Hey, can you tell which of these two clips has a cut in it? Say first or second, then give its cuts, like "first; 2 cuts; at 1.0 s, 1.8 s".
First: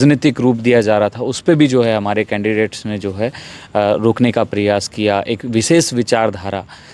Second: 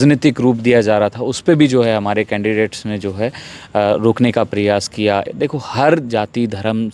second; 1 cut; at 5.2 s